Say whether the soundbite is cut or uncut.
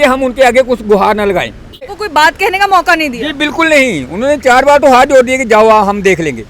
cut